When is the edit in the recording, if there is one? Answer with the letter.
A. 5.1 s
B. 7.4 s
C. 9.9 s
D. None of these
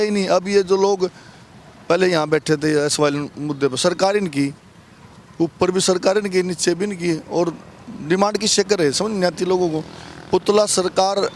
D